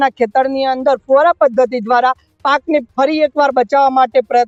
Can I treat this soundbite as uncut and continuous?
yes; 0 cuts

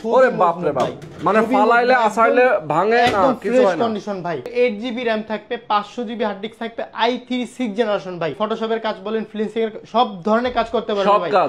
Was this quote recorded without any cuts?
no; 2 cuts; at 4.5 s, 8.4 s

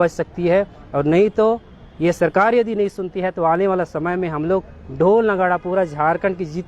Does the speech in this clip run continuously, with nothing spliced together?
yes; 0 cuts

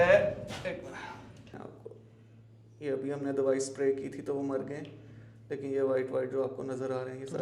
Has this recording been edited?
yes; 1 cut; at 1.5 s

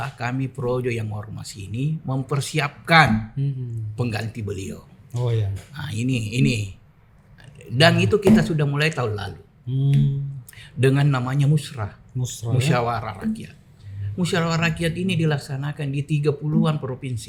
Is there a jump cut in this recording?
no; 0 cuts

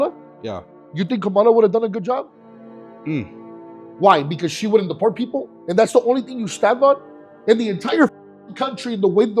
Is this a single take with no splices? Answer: yes; 0 cuts

